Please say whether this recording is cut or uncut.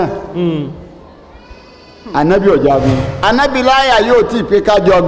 cut